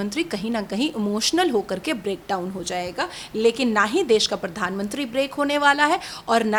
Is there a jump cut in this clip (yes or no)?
no